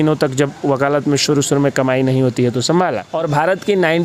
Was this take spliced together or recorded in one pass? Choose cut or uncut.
cut